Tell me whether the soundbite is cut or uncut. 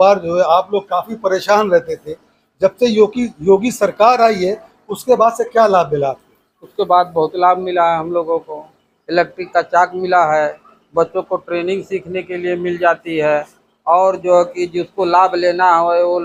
uncut